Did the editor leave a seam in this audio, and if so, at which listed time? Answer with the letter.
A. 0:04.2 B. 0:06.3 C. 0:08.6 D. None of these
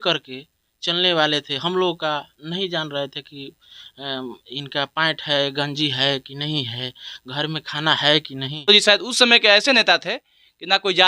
C